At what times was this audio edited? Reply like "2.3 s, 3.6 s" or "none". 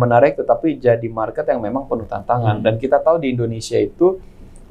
none